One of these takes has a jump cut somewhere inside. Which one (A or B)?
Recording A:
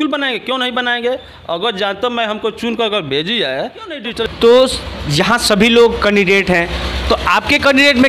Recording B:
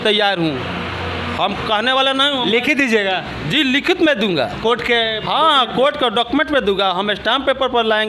A